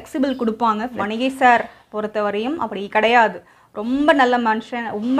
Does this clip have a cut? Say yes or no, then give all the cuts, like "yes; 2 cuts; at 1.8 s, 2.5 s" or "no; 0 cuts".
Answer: yes; 1 cut; at 1.0 s